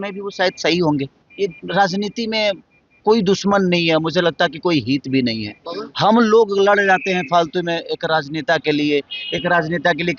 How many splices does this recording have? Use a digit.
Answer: 1